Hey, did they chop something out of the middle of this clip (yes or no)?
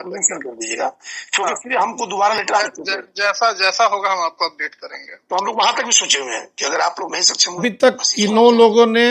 yes